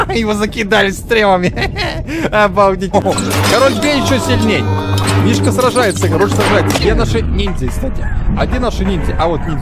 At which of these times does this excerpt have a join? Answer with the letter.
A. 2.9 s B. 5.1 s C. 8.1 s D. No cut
A